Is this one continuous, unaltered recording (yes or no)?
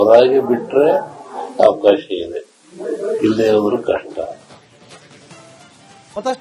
yes